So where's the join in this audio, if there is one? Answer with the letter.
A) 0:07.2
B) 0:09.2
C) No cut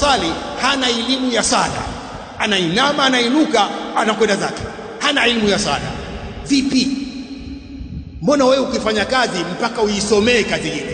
C